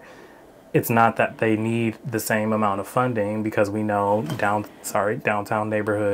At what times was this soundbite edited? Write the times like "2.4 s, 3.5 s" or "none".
none

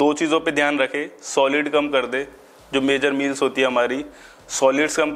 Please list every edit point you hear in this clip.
none

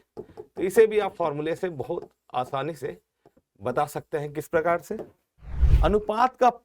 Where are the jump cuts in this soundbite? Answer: 5.6 s

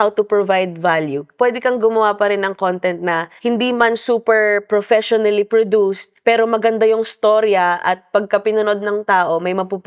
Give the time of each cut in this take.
1.3 s

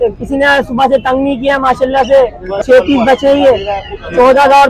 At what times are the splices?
2.6 s

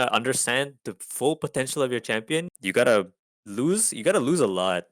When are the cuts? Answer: 2.5 s

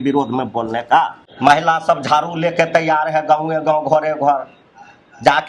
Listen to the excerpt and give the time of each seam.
1.2 s

